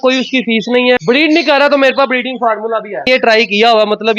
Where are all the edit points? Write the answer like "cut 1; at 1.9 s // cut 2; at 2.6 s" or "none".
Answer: cut 1; at 1.0 s // cut 2; at 3.1 s